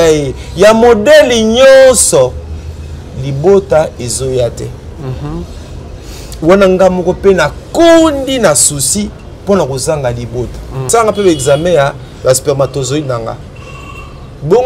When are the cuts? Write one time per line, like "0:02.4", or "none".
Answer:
0:10.9